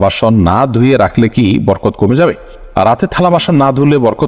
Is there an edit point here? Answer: no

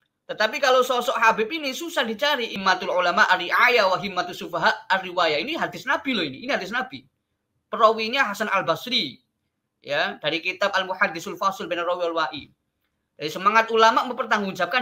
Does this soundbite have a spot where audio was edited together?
yes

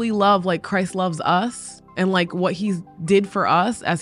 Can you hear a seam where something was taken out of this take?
no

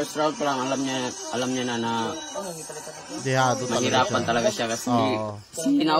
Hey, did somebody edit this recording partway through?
no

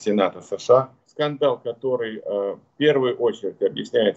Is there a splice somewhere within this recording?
yes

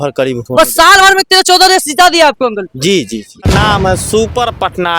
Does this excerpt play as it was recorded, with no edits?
no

